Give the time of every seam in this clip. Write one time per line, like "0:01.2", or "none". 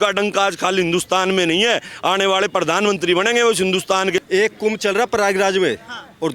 0:04.2